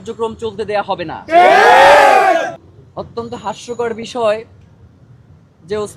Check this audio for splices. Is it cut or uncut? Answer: cut